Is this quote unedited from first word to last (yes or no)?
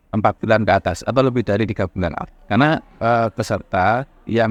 yes